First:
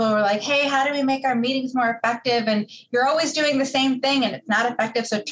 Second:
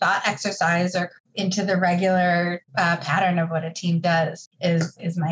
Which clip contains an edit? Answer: second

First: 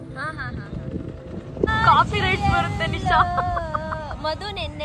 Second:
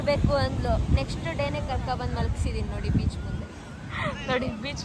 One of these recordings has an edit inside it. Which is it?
first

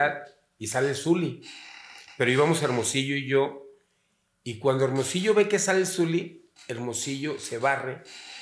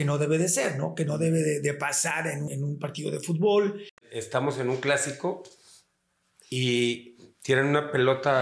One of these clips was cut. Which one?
second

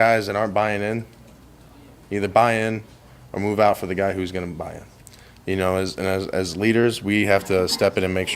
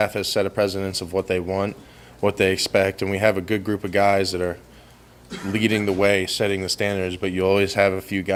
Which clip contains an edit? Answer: first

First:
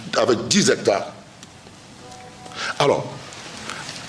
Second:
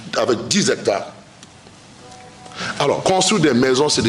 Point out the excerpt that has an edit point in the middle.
second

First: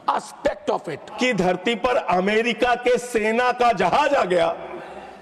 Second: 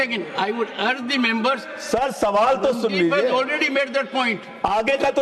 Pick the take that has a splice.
first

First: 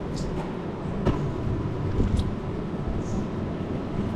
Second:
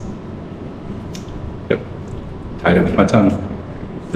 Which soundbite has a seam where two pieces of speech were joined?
first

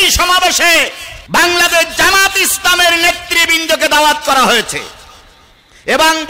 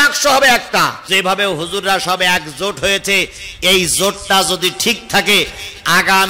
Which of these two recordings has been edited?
second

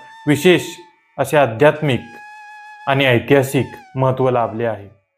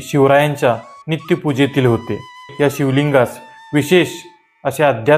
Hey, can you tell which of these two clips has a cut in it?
second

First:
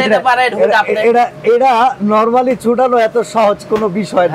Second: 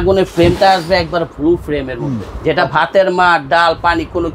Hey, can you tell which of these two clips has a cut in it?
second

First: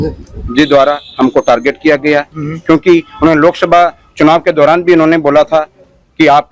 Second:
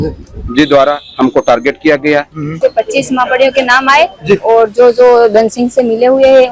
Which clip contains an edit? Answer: second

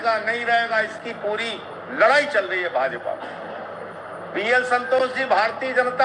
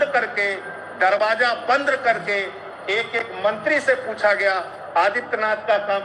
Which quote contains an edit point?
first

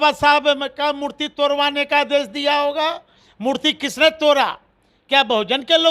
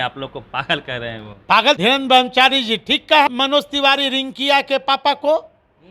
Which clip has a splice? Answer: second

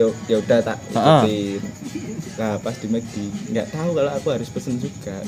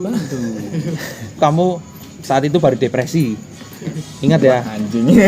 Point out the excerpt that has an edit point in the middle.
second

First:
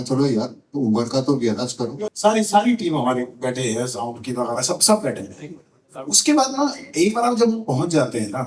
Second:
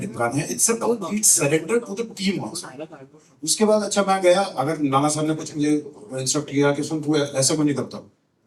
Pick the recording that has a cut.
first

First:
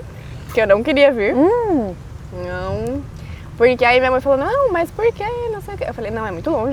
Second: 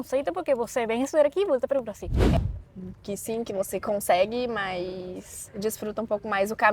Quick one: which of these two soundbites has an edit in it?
second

